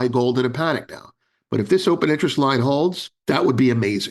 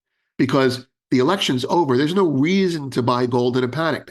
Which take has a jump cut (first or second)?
first